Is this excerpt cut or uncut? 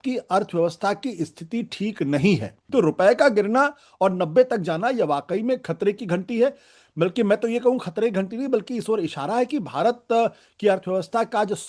cut